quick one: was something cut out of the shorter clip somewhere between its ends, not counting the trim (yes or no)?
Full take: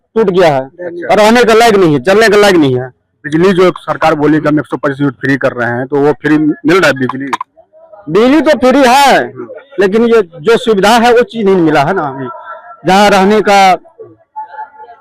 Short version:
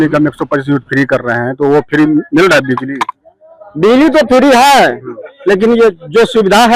no